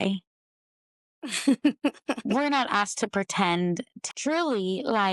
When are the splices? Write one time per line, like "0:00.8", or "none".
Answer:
0:03.9

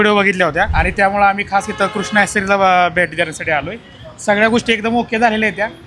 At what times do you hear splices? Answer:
none

